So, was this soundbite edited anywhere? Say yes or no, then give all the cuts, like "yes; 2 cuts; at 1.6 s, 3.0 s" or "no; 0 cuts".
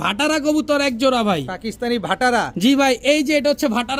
no; 0 cuts